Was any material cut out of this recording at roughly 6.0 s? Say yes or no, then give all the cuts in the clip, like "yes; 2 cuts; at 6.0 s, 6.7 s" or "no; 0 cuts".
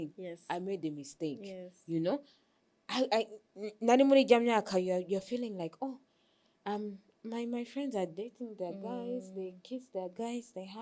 no; 0 cuts